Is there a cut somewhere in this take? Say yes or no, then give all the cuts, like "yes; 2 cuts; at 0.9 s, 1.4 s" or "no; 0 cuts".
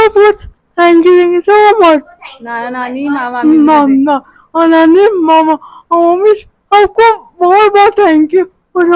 no; 0 cuts